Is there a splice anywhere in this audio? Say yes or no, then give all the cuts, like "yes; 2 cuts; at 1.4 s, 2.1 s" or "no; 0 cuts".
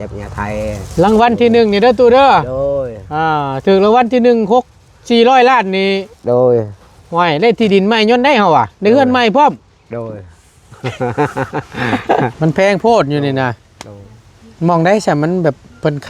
yes; 1 cut; at 12.3 s